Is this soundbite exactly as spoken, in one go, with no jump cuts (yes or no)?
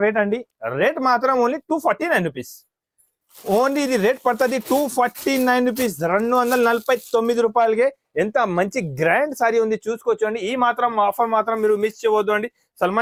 yes